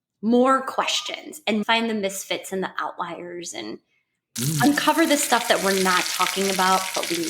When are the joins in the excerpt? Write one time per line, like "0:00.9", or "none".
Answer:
none